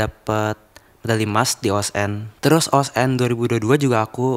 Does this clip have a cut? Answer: yes; 1 cut; at 2.2 s

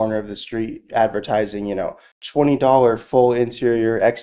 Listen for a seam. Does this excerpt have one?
no; 0 cuts

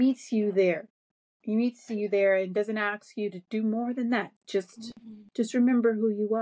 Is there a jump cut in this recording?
no; 0 cuts

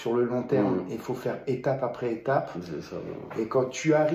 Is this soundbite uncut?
yes; 0 cuts

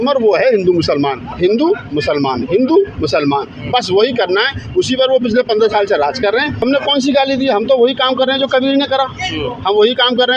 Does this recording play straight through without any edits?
no; 2 cuts; at 1.3 s, 6.6 s

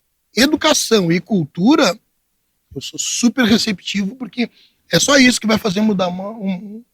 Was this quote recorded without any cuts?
yes; 0 cuts

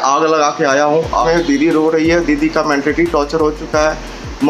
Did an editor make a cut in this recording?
yes; 1 cut; at 1.3 s

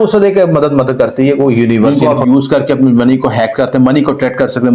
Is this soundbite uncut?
no; 1 cut; at 1.9 s

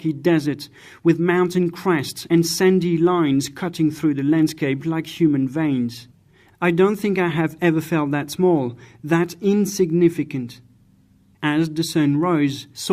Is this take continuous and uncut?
yes; 0 cuts

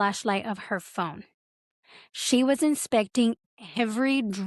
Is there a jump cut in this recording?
no; 0 cuts

